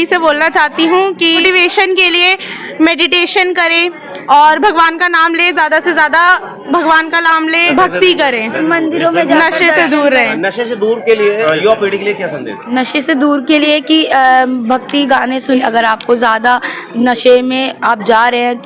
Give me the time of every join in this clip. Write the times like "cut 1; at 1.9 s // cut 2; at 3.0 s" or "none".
cut 1; at 1.4 s // cut 2; at 7.7 s // cut 3; at 8.6 s // cut 4; at 11.4 s // cut 5; at 12.5 s // cut 6; at 15.6 s